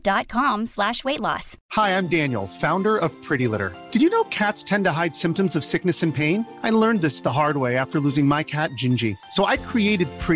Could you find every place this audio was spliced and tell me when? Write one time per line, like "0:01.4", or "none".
0:01.5